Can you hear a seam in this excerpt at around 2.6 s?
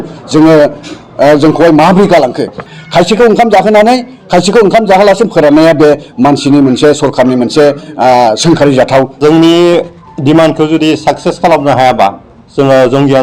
yes; 2 cuts; at 2.6 s, 9.1 s

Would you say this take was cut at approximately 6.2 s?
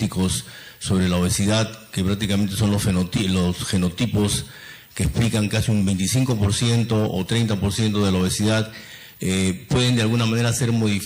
no; 1 cut; at 9.0 s

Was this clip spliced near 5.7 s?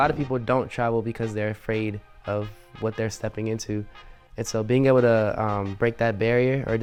no; 0 cuts

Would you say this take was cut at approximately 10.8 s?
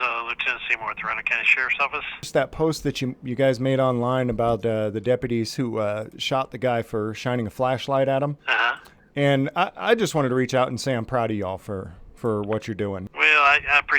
no; 3 cuts; at 2.2 s, 8.4 s, 13.1 s

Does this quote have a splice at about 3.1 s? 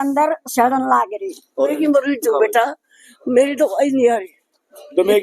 no; 1 cut; at 1.7 s

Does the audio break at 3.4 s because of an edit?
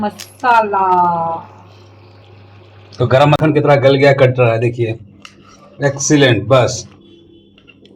yes; 1 cut; at 3.4 s

